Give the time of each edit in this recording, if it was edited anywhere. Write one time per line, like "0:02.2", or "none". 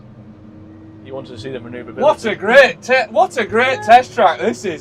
none

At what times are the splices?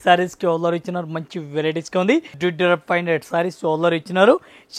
0:02.3

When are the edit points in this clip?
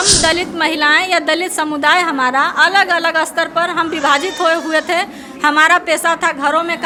none

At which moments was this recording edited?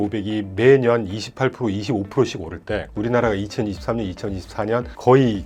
none

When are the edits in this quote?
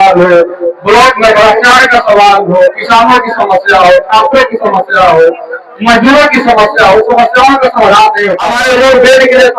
0:08.5

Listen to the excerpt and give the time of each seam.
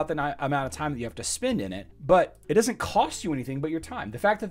0:01.9

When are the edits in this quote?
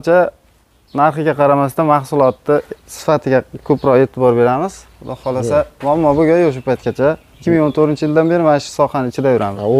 none

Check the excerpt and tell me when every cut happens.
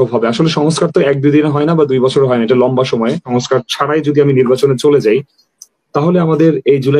0:03.3

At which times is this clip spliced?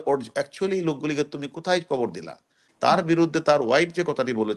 0:02.7

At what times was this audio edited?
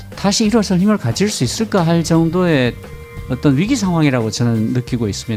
none

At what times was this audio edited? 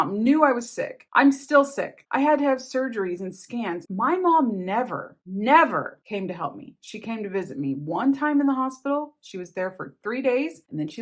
0:03.8

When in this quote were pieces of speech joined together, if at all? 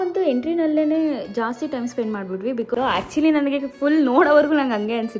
0:02.7

